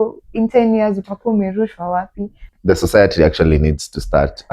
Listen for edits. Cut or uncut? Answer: cut